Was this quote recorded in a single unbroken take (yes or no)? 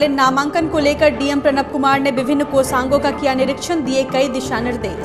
yes